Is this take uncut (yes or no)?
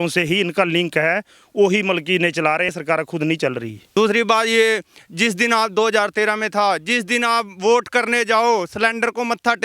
no